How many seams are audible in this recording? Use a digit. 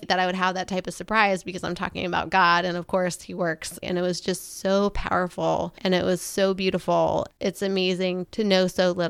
3